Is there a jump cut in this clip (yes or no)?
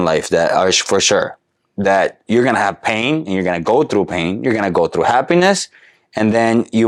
no